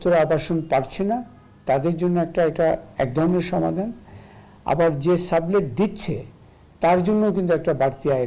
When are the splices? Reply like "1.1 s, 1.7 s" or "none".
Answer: none